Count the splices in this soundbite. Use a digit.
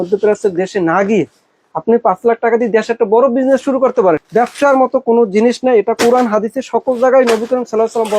1